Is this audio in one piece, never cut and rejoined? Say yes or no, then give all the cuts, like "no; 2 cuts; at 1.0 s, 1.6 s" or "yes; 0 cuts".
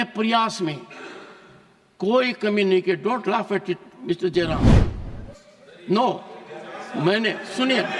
yes; 0 cuts